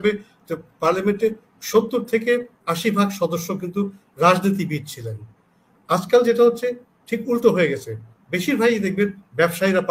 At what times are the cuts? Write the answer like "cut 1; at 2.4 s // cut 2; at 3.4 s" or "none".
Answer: none